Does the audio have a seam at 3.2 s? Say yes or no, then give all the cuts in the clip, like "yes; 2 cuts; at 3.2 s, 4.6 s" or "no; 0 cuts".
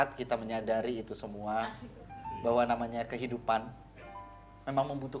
no; 0 cuts